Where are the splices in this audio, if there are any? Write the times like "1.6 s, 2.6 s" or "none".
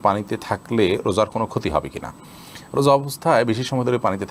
none